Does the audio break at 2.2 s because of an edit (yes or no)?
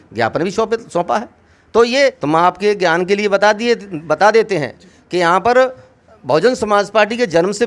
yes